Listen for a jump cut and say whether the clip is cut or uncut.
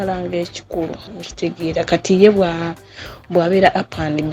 cut